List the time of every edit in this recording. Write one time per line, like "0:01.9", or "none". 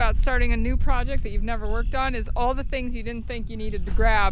none